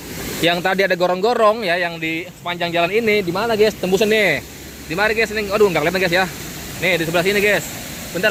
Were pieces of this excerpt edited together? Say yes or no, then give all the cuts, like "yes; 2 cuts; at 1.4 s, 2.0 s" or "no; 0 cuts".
no; 0 cuts